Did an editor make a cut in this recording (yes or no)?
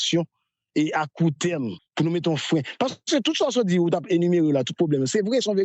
yes